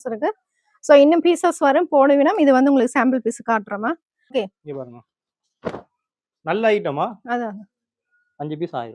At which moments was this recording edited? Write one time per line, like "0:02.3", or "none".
0:04.3